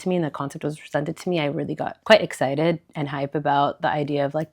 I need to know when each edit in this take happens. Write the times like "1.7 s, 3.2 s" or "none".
2.0 s